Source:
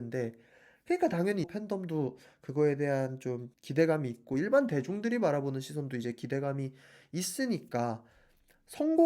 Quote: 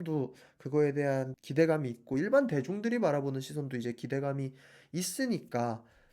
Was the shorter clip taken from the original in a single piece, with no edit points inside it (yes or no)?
no